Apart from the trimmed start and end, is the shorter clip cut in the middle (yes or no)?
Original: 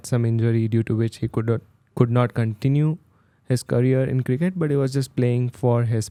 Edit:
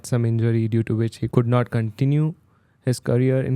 yes